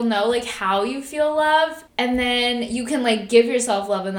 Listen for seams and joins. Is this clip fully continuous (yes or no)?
no